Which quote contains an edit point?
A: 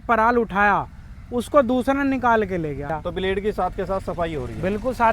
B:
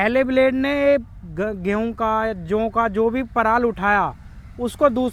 A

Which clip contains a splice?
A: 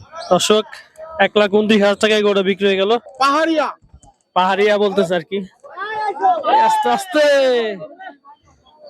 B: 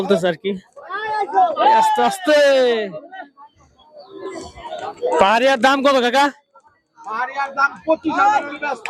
A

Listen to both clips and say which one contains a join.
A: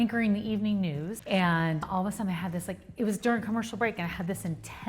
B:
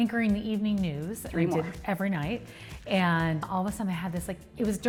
A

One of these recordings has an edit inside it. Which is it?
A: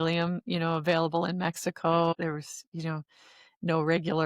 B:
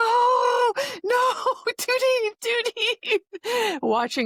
A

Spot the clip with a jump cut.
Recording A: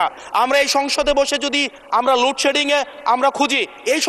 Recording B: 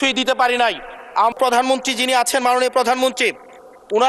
B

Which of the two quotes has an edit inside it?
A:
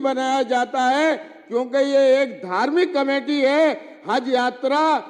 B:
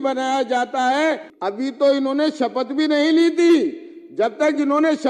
B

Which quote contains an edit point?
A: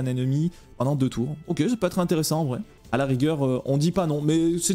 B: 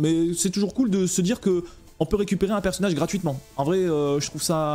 A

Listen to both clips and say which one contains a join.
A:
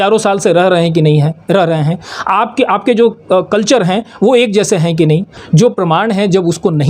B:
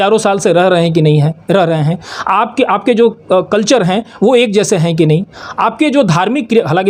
A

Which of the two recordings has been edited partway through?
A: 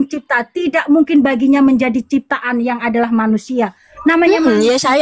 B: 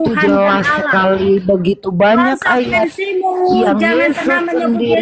A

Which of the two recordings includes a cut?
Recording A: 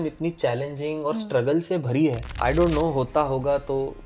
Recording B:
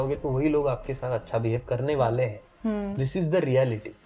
A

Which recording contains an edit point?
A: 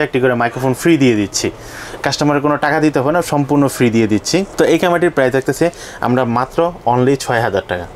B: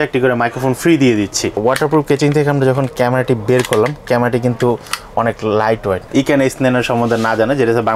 B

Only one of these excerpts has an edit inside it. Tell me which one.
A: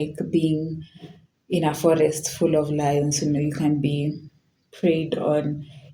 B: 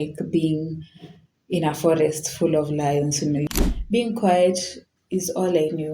B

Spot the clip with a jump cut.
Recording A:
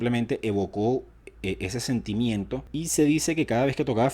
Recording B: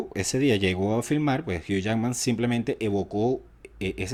A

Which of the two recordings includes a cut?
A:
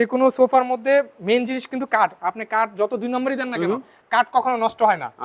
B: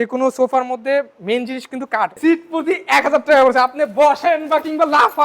B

